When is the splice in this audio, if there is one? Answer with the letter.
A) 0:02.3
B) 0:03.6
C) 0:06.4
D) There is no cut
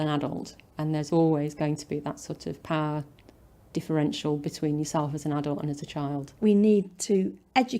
C